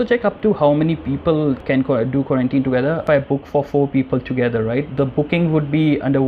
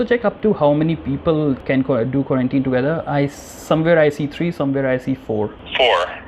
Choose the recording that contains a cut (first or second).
first